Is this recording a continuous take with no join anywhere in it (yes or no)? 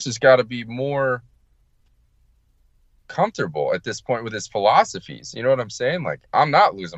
yes